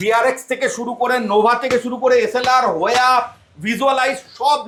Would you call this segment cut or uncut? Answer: uncut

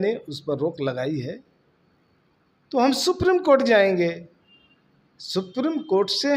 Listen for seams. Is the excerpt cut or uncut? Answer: uncut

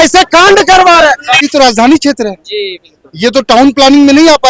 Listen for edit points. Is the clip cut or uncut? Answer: cut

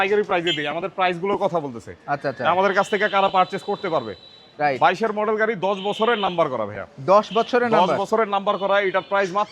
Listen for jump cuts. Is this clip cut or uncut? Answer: uncut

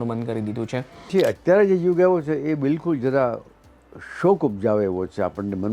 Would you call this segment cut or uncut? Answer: cut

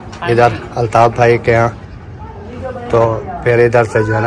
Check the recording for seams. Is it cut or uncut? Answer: uncut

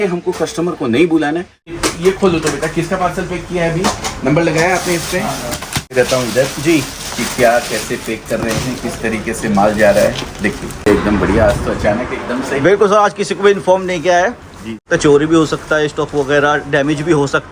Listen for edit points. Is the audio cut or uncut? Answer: cut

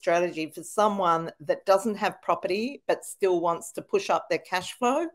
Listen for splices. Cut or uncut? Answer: uncut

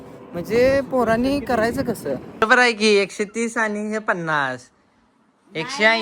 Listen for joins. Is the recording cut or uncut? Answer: cut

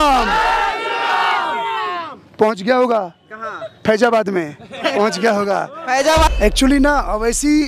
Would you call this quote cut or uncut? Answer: cut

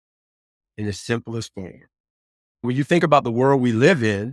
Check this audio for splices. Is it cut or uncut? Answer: cut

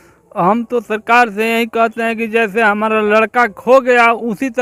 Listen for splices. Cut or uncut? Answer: uncut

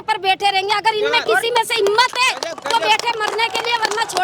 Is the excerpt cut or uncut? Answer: uncut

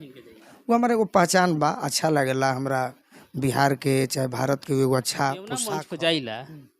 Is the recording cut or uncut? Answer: cut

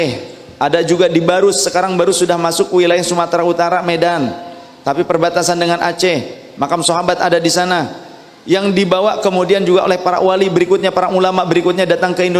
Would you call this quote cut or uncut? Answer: uncut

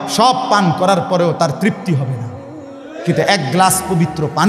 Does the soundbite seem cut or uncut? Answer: uncut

